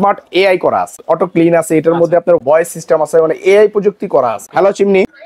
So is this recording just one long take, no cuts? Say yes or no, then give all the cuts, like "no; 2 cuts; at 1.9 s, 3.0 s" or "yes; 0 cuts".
no; 3 cuts; at 1.0 s, 2.4 s, 4.4 s